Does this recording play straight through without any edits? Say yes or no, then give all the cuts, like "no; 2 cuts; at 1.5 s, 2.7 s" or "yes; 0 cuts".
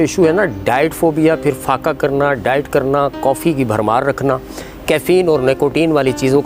yes; 0 cuts